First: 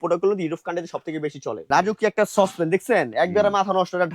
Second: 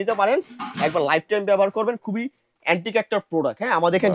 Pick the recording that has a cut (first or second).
first